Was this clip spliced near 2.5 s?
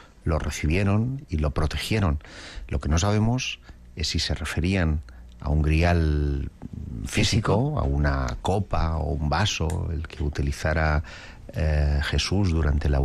no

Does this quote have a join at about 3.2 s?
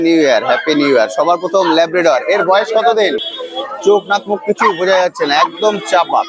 yes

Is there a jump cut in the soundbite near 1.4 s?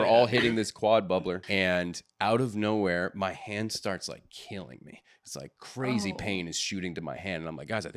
yes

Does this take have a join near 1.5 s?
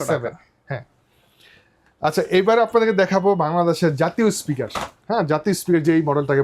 no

